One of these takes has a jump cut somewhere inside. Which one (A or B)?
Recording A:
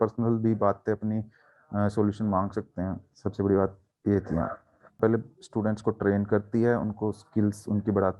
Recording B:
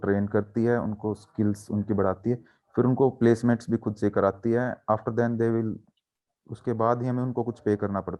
A